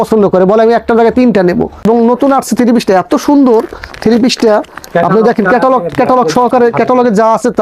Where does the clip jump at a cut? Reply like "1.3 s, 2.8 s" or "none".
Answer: 1.8 s